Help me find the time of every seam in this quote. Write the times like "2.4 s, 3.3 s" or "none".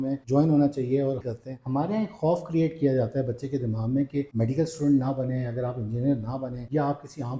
1.3 s, 4.3 s